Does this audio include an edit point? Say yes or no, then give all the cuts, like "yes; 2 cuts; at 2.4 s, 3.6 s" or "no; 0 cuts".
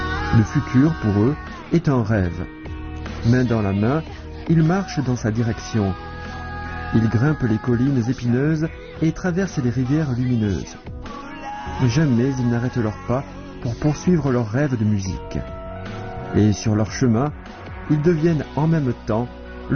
no; 0 cuts